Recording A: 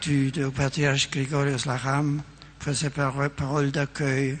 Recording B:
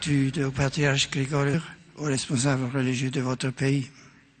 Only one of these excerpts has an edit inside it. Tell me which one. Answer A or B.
A